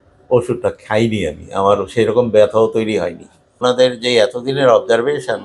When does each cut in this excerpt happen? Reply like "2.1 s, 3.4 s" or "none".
3.6 s